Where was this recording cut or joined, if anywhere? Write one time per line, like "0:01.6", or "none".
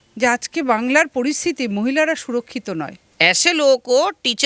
0:03.0